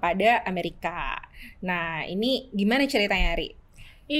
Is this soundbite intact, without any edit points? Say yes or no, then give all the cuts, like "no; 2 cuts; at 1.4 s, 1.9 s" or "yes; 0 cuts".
yes; 0 cuts